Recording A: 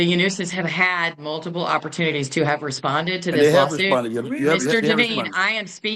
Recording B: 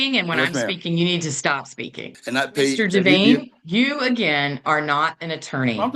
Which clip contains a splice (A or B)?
B